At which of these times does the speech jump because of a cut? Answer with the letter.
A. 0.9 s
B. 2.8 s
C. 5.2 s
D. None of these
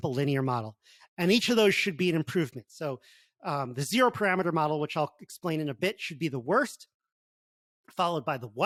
D